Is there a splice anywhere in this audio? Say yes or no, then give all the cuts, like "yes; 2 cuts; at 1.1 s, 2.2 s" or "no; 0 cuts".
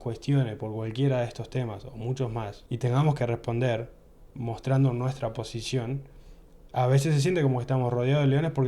yes; 1 cut; at 2.6 s